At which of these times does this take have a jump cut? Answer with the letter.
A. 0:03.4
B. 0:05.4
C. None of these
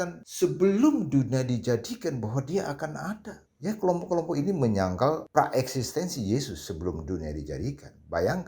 A